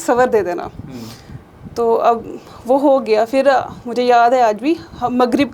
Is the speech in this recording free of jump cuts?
yes; 0 cuts

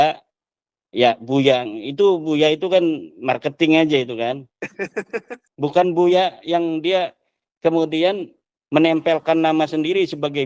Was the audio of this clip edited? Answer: no; 0 cuts

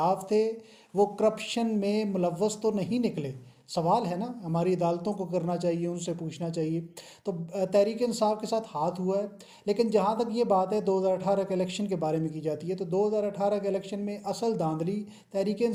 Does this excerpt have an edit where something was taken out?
no; 0 cuts

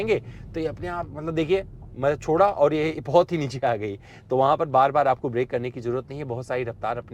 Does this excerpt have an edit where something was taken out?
no; 0 cuts

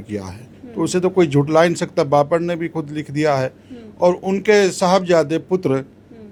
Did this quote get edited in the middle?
no; 0 cuts

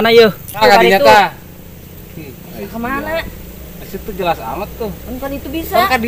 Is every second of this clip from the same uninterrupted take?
yes; 0 cuts

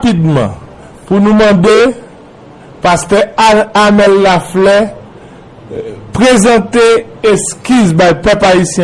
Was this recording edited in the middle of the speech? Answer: no; 0 cuts

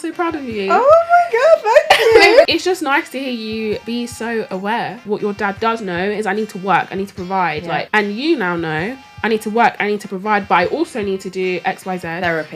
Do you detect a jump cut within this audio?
yes; 4 cuts; at 2.4 s, 3.8 s, 5.0 s, 7.9 s

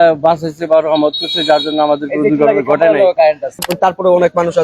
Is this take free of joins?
no; 1 cut; at 3.6 s

